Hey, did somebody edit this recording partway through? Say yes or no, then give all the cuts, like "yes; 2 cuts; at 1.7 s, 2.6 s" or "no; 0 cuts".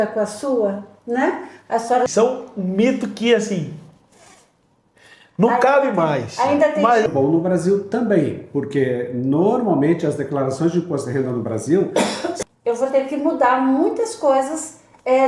yes; 3 cuts; at 2.1 s, 7.0 s, 12.4 s